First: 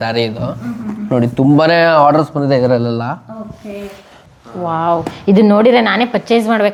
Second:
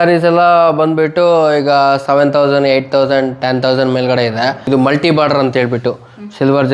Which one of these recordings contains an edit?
second; 1 cut; at 4.6 s

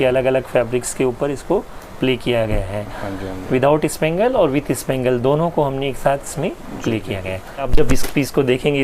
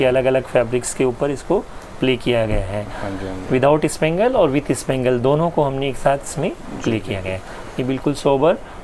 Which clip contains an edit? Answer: first; 1 cut; at 7.7 s

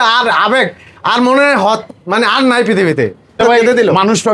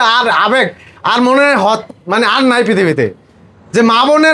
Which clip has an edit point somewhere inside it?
first; 1 cut; at 3.4 s

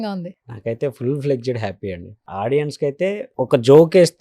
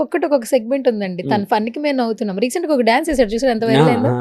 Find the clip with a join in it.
first; 2 cuts; at 2.1 s, 3.3 s

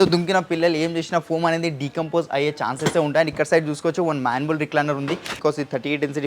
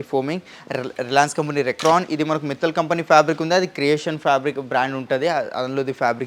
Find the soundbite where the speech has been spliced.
first; 1 cut; at 5.4 s

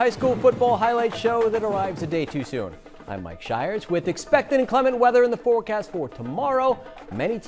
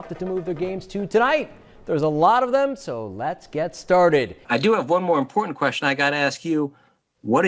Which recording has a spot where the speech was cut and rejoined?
second; 1 cut; at 4.4 s

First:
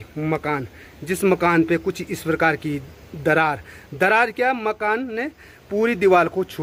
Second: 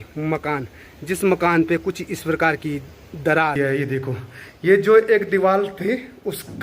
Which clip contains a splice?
second; 1 cut; at 3.5 s

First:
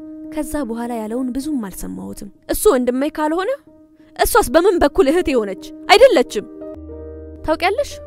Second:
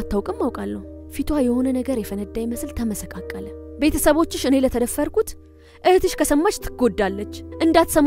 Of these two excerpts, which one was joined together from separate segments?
first; 1 cut; at 6.6 s

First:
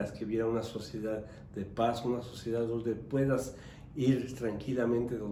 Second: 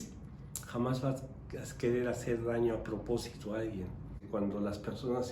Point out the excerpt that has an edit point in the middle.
second; 1 cut; at 4.2 s

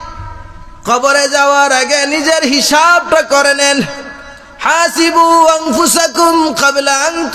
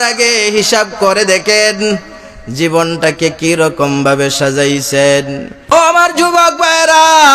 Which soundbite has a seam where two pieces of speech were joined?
second; 1 cut; at 5.7 s

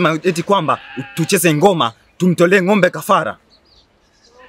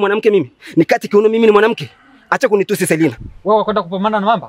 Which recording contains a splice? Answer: second; 1 cut; at 3.2 s

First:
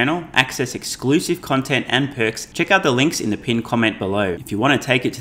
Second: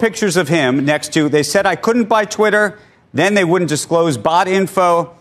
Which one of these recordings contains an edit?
first; 2 cuts; at 2.4 s, 4.4 s

